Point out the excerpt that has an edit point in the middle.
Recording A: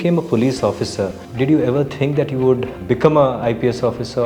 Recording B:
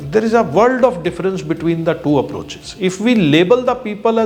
A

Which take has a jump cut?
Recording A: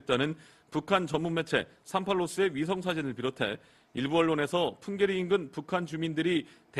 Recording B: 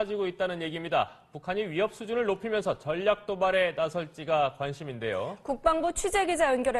A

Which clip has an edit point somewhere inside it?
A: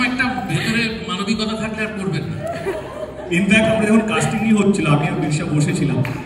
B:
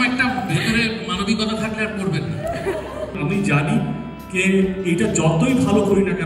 B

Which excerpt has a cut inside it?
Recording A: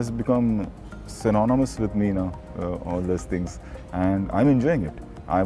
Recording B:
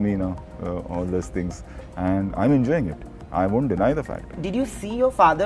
B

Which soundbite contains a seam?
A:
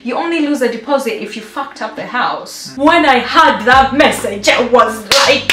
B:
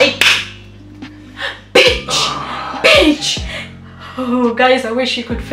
A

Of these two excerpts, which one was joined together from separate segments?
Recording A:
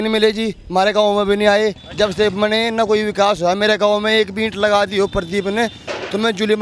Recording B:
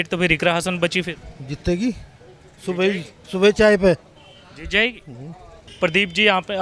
B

